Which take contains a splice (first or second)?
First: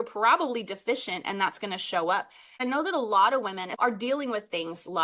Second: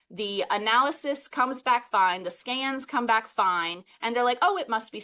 first